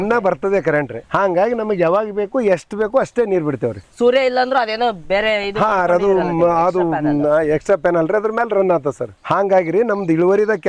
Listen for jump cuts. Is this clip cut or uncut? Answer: uncut